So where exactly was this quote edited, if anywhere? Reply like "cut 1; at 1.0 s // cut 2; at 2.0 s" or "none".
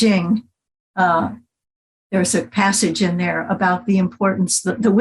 none